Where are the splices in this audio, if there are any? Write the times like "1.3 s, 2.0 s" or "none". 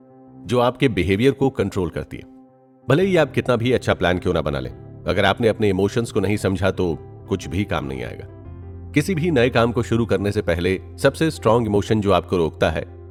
none